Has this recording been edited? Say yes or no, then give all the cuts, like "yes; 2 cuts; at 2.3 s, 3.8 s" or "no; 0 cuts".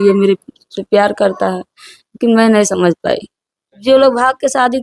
yes; 1 cut; at 3.7 s